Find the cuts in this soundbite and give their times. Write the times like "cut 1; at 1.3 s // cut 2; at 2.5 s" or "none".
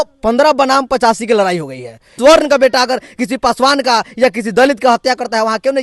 cut 1; at 2.1 s